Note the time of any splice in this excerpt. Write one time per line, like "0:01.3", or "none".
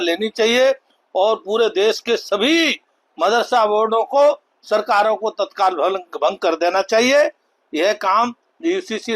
none